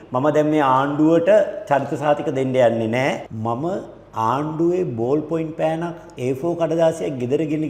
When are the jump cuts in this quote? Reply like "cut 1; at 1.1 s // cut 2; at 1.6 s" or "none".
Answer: cut 1; at 3.3 s